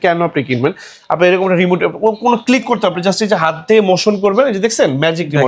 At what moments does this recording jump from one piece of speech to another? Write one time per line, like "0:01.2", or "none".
none